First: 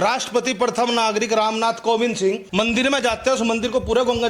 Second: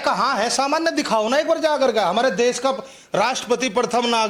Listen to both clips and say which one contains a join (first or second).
first